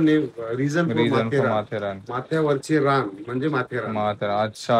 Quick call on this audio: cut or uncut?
uncut